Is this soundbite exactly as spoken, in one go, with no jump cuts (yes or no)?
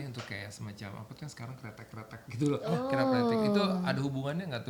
yes